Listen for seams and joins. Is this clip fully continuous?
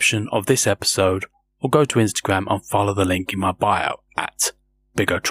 yes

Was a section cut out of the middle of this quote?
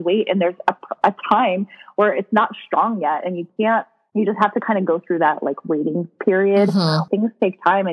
yes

